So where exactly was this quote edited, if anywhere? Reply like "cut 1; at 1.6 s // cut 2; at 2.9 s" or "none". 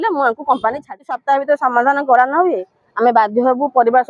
cut 1; at 1.1 s